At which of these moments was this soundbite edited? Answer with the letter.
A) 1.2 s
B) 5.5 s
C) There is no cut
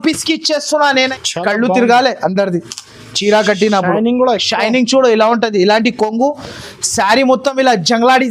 A